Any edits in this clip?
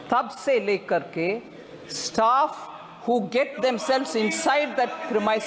no; 0 cuts

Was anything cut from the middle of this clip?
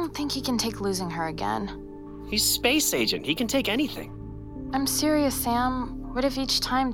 yes; 1 cut; at 6.0 s

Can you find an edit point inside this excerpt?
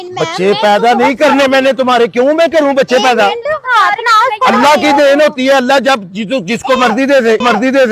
no; 0 cuts

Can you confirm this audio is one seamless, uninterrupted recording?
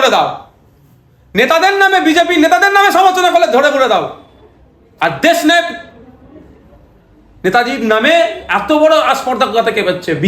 yes; 0 cuts

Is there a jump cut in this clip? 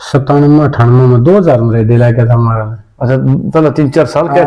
no; 0 cuts

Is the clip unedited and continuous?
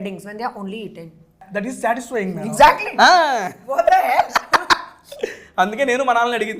no; 1 cut; at 1.5 s

